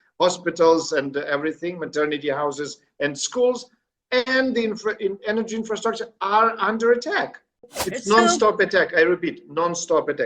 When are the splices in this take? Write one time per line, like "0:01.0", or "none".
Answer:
0:07.7